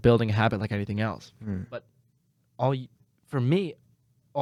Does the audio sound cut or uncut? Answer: uncut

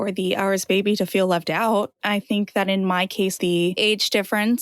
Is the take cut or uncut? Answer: cut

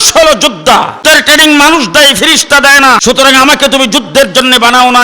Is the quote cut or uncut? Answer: cut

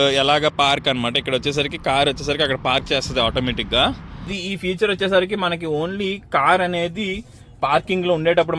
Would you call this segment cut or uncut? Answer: cut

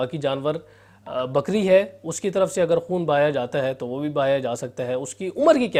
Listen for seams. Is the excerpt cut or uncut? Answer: uncut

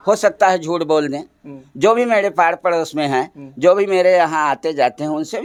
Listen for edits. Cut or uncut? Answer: uncut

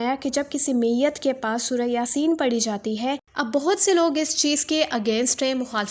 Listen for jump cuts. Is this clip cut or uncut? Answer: cut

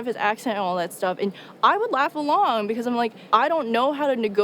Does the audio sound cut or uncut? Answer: cut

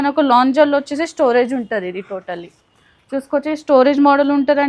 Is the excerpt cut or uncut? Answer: uncut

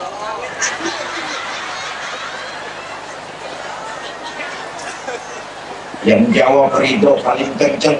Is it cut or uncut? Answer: uncut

